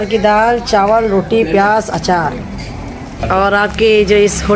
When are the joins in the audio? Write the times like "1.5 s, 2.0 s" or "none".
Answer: 3.2 s